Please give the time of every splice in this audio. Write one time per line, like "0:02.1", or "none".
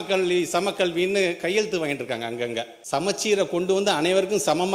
0:02.7